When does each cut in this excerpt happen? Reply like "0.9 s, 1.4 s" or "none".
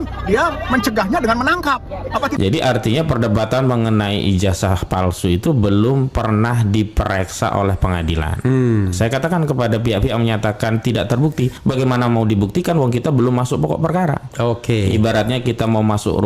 2.3 s, 11.6 s